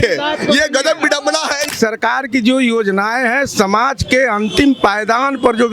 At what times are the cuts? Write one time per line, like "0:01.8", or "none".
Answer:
0:01.6